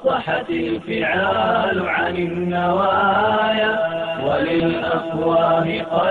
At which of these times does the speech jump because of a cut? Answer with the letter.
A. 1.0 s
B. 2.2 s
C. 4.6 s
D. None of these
C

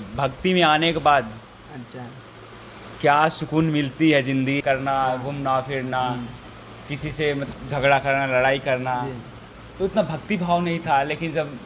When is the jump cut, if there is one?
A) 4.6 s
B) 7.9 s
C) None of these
A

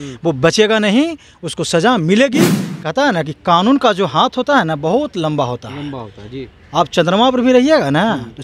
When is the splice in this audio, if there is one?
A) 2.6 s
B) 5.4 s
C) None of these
A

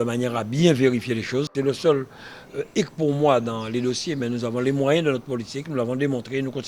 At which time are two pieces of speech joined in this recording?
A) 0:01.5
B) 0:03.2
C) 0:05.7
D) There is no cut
A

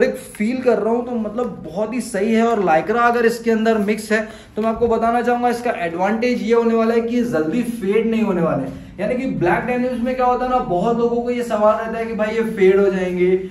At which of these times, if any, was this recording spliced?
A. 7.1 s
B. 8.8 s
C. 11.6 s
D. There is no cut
D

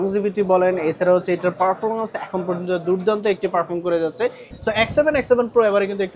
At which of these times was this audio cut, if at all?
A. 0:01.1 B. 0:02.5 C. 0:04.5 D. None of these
C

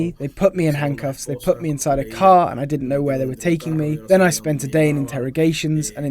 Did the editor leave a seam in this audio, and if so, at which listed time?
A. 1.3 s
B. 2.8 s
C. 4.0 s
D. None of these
C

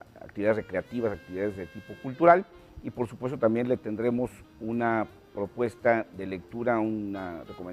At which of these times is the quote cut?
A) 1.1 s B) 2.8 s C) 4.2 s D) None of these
B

